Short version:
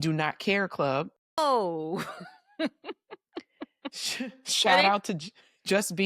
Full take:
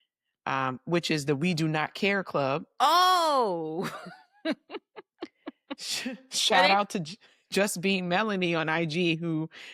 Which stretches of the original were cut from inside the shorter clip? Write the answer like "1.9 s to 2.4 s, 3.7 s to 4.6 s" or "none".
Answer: 2.8 s to 3.1 s